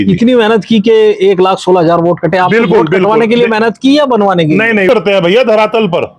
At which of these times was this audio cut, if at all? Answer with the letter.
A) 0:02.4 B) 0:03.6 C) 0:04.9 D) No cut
C